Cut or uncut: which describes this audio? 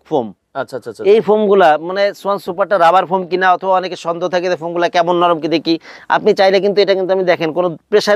uncut